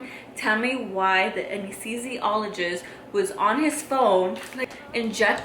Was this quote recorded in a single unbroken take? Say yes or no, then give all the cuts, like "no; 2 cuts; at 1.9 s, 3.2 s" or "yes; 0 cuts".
no; 1 cut; at 4.5 s